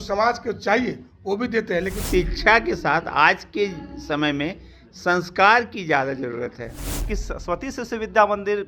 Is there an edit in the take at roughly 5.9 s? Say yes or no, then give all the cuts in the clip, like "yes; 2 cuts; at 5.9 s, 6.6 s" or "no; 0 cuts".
no; 2 cuts; at 2.0 s, 7.1 s